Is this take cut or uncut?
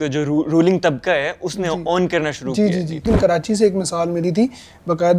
cut